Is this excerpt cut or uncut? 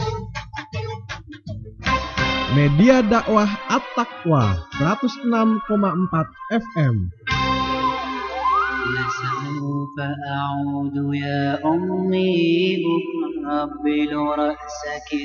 cut